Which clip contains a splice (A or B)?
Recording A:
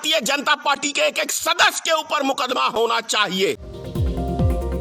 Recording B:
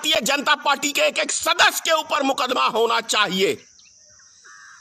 A